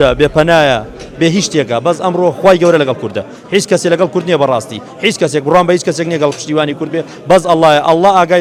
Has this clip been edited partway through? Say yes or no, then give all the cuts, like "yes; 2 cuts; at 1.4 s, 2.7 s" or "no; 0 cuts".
no; 0 cuts